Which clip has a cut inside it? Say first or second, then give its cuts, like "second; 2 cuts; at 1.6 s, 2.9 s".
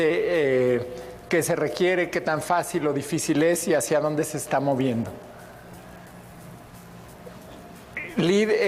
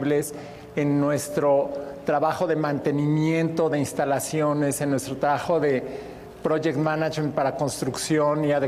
second; 1 cut; at 5.0 s